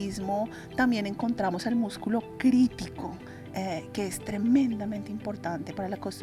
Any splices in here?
no; 0 cuts

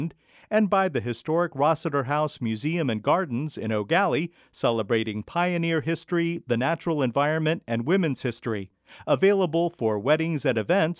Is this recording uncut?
yes; 0 cuts

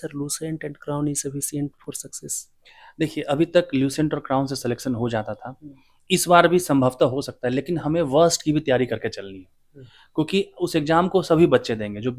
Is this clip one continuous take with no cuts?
yes; 0 cuts

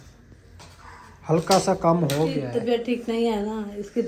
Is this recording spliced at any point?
yes; 1 cut; at 2.4 s

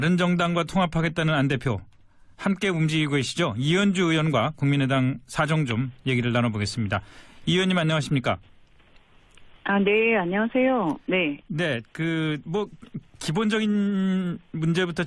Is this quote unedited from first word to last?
no; 1 cut; at 13.9 s

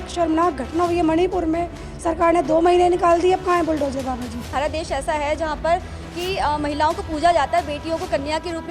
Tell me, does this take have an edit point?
yes; 1 cut; at 4.5 s

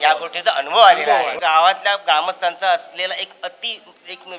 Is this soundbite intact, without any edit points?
no; 1 cut; at 1.4 s

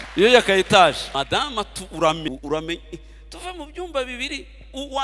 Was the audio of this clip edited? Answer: yes; 2 cuts; at 1.0 s, 2.3 s

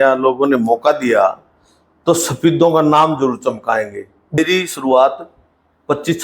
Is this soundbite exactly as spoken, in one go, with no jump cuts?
no; 1 cut; at 4.4 s

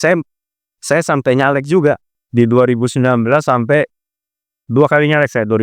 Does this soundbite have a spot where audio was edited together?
yes; 1 cut; at 2.2 s

